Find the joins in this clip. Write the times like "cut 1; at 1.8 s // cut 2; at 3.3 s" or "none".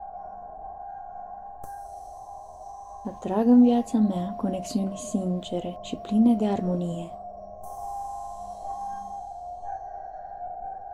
none

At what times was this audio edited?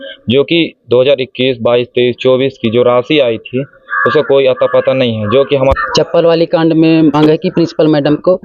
cut 1; at 5.7 s // cut 2; at 7.2 s

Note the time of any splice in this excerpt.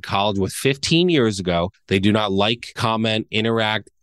cut 1; at 1.8 s // cut 2; at 2.7 s

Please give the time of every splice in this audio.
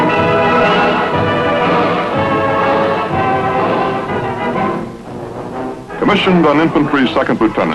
cut 1; at 2.8 s

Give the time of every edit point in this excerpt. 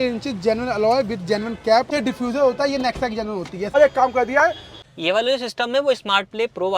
cut 1; at 1.9 s // cut 2; at 3.8 s // cut 3; at 4.8 s

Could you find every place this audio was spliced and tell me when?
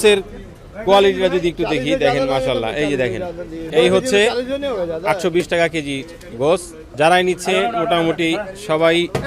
cut 1; at 3.7 s // cut 2; at 6.8 s

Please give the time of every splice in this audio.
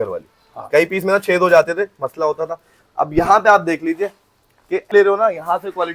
cut 1; at 4.9 s

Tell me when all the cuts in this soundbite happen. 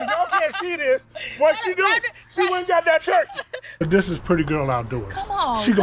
cut 1; at 3.8 s

